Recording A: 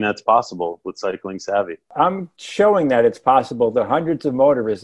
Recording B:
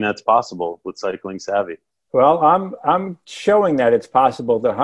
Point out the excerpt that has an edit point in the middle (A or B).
A